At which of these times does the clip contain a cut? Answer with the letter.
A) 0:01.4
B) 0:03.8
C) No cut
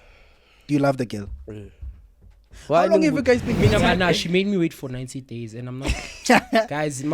B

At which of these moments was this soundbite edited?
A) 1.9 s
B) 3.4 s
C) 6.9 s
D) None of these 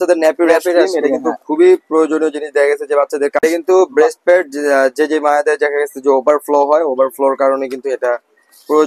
B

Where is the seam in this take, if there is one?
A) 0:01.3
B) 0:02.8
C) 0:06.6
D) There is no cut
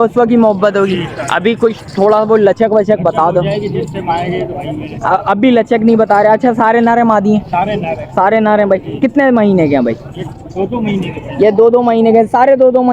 D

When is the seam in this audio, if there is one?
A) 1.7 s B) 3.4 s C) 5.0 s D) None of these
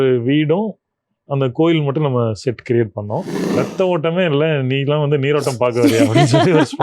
B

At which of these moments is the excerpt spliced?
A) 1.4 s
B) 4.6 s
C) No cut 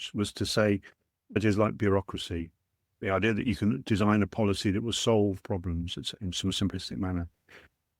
A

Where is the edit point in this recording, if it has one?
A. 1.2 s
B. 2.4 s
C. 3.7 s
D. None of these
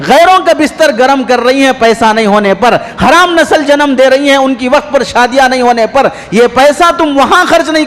D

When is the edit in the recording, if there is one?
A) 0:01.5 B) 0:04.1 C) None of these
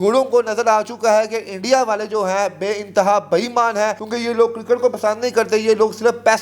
B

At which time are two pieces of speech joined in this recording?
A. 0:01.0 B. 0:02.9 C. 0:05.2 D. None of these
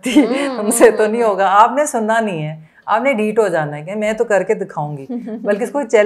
D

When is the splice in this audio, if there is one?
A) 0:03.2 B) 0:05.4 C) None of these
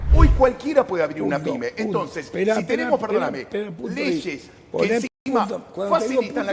C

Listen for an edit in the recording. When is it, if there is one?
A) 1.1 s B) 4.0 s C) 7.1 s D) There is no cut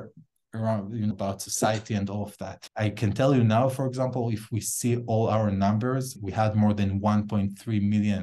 A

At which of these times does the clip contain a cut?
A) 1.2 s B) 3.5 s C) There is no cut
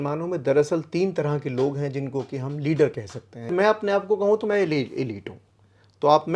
B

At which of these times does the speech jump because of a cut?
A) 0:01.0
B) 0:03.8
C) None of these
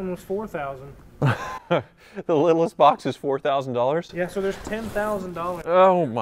C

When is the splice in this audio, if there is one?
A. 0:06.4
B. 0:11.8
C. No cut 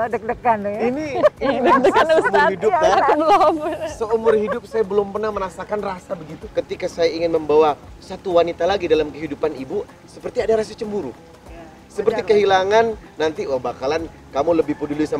A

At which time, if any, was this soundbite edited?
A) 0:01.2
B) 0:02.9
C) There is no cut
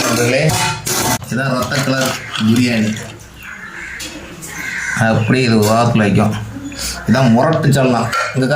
A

